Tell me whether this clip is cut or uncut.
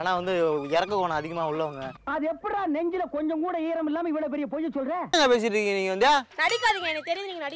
cut